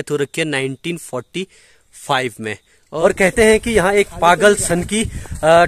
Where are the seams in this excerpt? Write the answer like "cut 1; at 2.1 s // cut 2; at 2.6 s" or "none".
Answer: cut 1; at 2.9 s